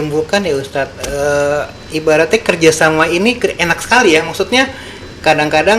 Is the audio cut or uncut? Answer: uncut